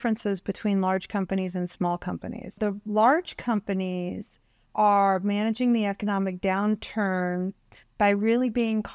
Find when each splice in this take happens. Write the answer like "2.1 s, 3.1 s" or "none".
2.6 s